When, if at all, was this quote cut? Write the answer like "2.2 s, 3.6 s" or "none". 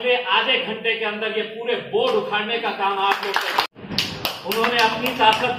3.7 s